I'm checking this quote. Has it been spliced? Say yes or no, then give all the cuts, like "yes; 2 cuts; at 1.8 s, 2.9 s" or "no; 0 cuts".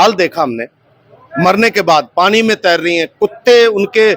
no; 0 cuts